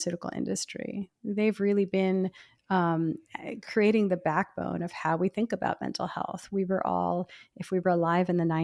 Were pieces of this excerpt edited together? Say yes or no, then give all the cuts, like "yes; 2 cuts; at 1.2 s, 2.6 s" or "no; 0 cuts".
no; 0 cuts